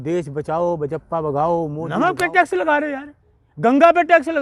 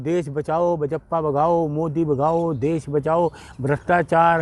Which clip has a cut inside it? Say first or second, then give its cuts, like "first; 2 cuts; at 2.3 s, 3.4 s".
first; 1 cut; at 1.8 s